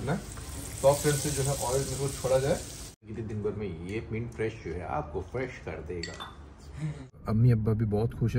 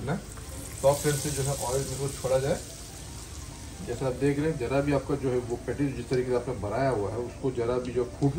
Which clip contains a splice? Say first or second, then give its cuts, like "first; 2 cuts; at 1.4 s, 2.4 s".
first; 2 cuts; at 3.1 s, 7.2 s